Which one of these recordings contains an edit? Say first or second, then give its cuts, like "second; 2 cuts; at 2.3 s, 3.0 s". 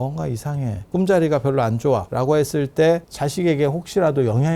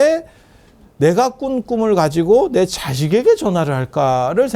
first; 3 cuts; at 0.8 s, 2.1 s, 3.1 s